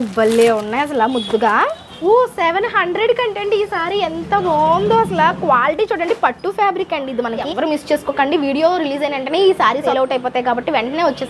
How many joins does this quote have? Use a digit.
3